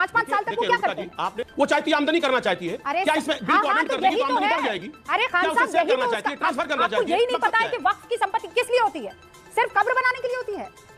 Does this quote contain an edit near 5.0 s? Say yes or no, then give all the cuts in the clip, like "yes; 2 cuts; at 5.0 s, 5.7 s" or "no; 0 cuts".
no; 1 cut; at 1.2 s